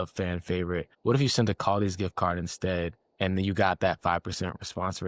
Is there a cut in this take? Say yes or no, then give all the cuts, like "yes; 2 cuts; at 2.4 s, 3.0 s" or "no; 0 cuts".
yes; 1 cut; at 0.9 s